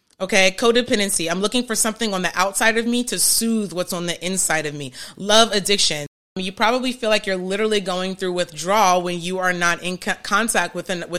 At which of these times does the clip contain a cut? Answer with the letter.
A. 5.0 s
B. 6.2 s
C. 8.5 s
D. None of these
B